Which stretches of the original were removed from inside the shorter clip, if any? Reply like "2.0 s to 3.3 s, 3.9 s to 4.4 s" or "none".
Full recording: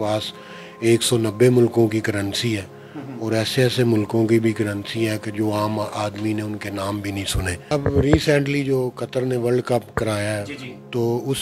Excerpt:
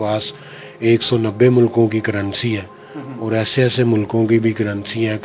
none

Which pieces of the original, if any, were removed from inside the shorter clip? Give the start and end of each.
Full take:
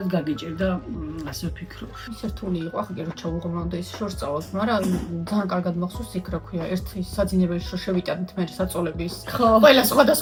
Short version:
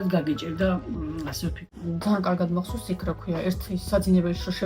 1.8 s to 5.1 s

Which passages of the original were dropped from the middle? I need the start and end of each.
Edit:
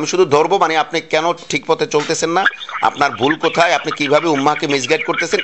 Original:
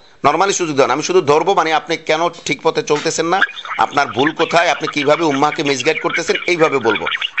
none

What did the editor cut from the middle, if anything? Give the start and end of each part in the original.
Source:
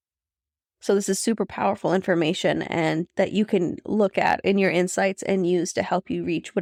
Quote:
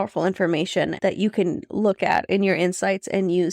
2.6 s to 3.1 s

